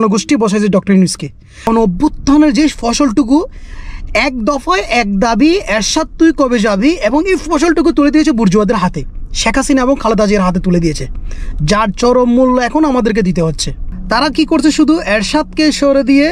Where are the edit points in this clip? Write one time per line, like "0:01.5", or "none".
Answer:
0:01.6

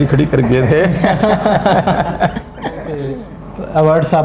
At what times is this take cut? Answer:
0:02.9

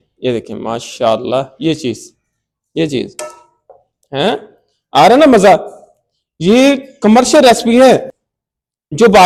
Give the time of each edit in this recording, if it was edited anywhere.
none

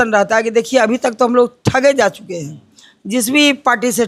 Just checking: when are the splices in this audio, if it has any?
none

